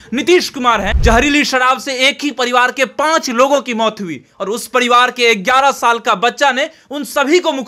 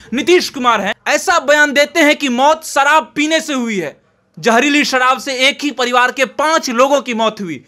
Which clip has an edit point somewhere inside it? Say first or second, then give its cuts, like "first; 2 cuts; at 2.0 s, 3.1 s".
first; 1 cut; at 0.9 s